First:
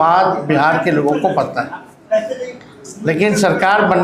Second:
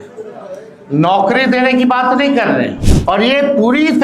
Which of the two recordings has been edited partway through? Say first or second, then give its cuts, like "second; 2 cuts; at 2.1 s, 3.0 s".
second; 1 cut; at 2.9 s